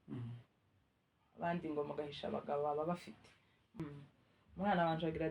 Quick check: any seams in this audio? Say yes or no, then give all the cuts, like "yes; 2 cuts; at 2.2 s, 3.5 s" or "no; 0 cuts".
yes; 1 cut; at 3.8 s